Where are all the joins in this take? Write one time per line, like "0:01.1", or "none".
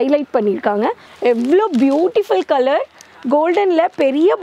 0:01.1